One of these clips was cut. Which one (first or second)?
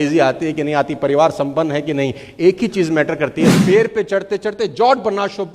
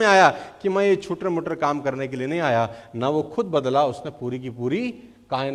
first